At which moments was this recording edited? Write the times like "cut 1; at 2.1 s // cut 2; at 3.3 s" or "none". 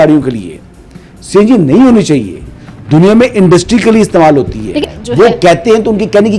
cut 1; at 4.9 s